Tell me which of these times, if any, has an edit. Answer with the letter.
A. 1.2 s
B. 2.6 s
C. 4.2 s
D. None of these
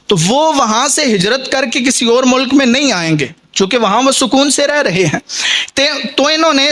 D